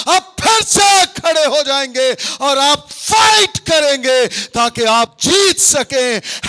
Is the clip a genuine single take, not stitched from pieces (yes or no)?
yes